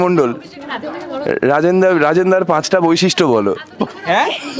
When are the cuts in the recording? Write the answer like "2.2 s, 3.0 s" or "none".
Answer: none